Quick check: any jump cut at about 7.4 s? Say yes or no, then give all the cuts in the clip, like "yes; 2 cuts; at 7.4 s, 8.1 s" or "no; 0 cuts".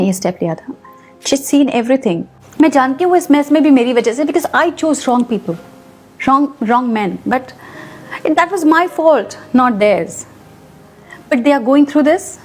no; 1 cut; at 2.4 s